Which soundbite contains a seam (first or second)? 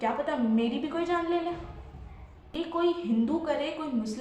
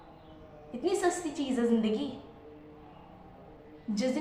first